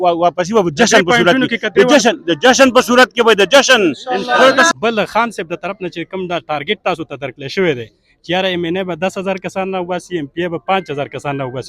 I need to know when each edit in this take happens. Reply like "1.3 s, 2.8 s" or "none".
4.7 s